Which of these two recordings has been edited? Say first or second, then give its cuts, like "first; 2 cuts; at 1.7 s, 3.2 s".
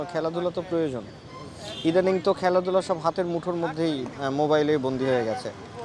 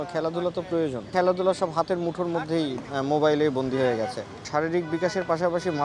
second; 2 cuts; at 1.1 s, 4.4 s